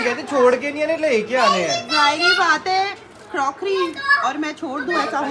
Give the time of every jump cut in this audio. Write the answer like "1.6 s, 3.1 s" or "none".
none